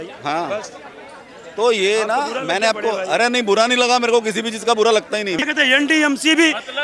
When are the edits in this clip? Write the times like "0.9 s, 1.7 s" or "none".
5.4 s